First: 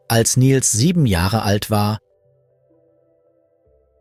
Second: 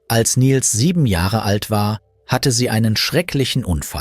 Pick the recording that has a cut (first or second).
second